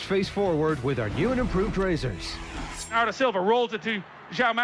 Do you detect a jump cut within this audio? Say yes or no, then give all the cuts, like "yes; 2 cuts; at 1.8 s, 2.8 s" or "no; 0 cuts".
yes; 1 cut; at 2.9 s